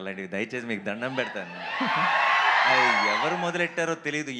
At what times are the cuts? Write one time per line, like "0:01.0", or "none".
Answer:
none